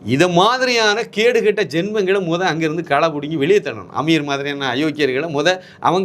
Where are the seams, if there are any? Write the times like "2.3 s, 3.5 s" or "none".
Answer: none